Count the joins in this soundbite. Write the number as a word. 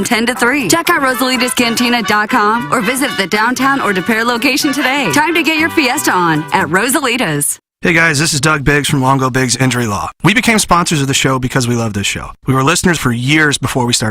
one